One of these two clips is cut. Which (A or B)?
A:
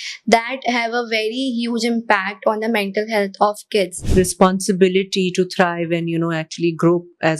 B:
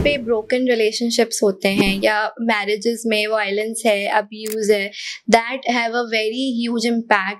A